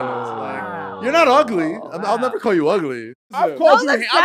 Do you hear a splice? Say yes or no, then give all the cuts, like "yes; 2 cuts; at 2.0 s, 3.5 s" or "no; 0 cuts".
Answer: yes; 1 cut; at 3.4 s